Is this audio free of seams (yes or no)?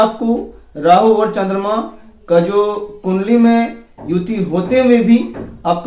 yes